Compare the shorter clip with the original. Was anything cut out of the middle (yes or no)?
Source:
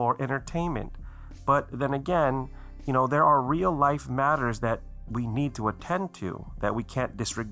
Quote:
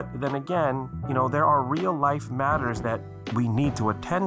yes